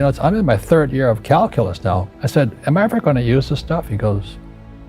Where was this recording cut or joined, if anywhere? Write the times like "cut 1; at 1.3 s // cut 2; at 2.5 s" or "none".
cut 1; at 2.1 s

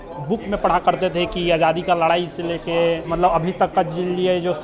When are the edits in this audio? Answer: cut 1; at 3.0 s

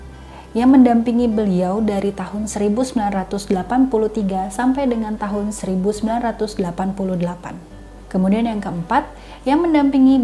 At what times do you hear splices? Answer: none

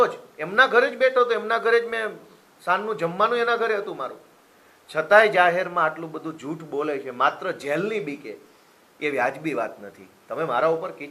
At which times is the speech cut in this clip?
none

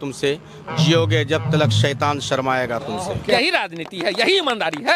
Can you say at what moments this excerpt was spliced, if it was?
cut 1; at 3.3 s

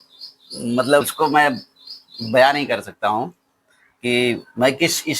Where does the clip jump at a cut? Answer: cut 1; at 1.0 s

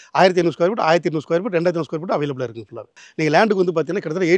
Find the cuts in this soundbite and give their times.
cut 1; at 3.0 s

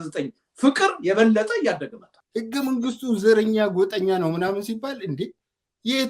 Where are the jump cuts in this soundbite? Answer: cut 1; at 2.2 s

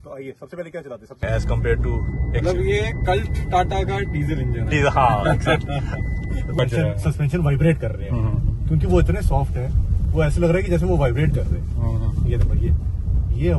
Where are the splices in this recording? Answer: cut 1; at 1.2 s // cut 2; at 6.5 s

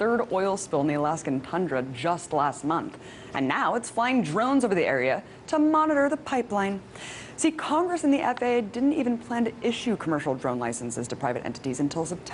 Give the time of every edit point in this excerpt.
cut 1; at 2.1 s

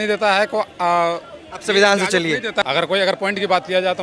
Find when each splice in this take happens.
cut 1; at 2.6 s

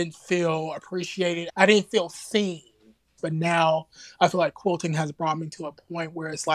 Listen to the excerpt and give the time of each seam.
cut 1; at 1.5 s // cut 2; at 3.2 s

